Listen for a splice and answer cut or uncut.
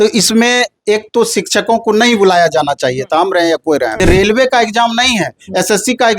cut